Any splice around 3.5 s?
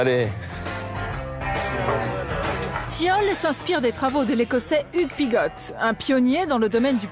yes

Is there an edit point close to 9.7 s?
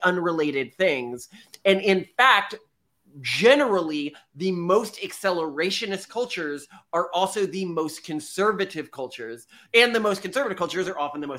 no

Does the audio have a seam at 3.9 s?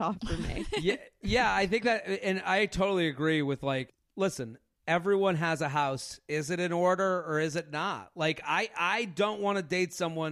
yes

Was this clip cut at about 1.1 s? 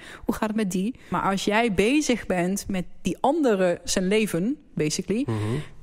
yes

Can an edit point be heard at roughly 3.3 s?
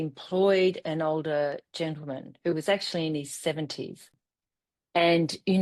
no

